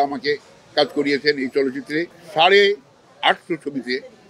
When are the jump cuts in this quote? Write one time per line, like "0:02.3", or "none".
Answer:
0:02.2